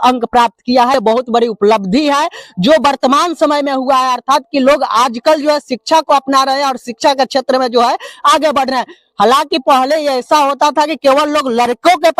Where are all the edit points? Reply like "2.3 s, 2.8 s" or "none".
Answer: 1.0 s